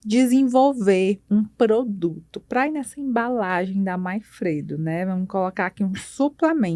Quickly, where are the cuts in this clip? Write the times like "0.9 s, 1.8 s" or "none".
none